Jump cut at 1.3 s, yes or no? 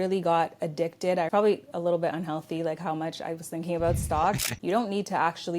yes